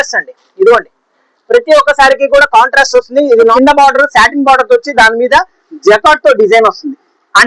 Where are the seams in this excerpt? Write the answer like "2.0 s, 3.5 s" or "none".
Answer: 3.5 s